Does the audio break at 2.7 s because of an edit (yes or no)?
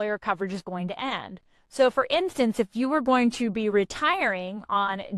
no